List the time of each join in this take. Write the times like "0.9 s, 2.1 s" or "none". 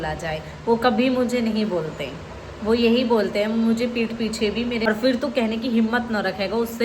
4.9 s